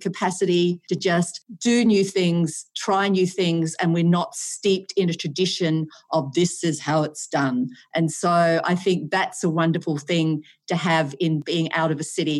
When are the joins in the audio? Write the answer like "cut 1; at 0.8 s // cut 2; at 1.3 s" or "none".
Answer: cut 1; at 0.9 s